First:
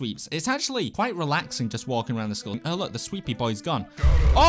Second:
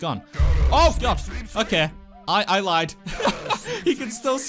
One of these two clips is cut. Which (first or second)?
first